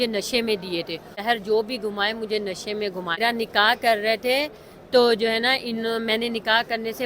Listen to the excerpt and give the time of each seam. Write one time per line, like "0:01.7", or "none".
0:01.2
0:03.2